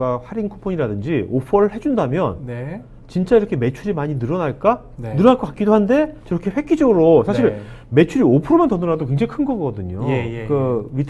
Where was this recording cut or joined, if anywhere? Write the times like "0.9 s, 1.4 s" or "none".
none